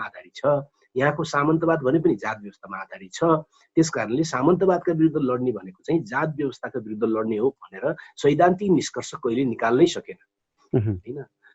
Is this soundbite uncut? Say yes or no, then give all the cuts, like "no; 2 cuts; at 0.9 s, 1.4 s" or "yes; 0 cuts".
yes; 0 cuts